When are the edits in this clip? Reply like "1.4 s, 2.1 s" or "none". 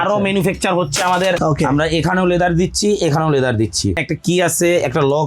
1.4 s, 4.0 s